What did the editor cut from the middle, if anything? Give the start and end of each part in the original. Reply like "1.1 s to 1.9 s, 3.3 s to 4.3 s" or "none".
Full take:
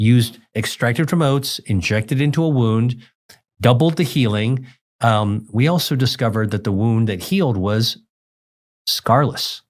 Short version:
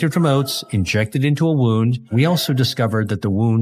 3.0 s to 5.5 s